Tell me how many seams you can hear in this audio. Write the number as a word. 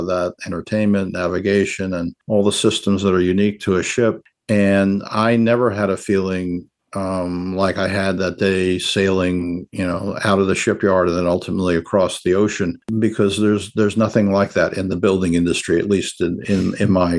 one